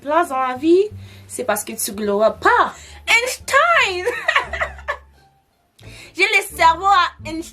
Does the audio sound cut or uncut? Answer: cut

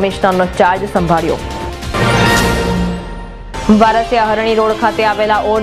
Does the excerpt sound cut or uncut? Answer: uncut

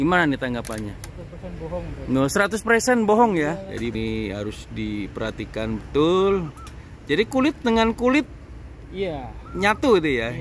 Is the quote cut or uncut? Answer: cut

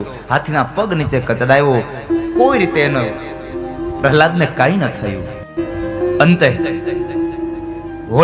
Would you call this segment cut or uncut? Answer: uncut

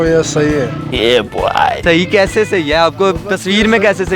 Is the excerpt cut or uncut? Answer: uncut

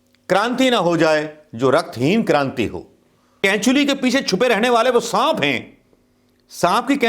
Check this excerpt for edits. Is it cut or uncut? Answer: cut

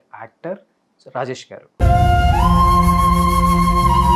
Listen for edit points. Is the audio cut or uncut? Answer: uncut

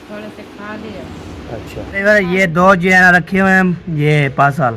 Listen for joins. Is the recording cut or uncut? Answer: cut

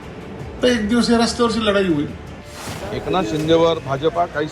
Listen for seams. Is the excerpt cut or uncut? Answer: cut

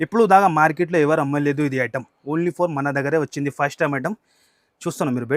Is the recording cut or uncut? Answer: uncut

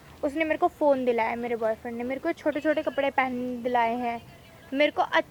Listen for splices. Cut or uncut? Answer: uncut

